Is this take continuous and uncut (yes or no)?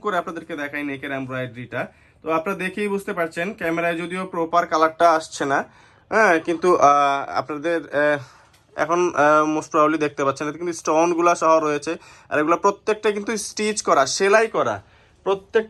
yes